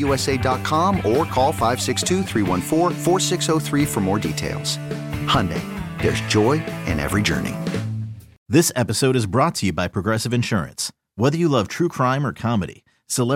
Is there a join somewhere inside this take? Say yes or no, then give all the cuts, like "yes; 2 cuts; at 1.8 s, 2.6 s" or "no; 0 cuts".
yes; 1 cut; at 8.4 s